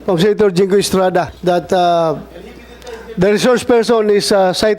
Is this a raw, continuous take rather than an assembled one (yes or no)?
no